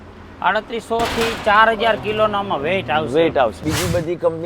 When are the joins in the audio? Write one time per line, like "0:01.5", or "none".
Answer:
0:03.6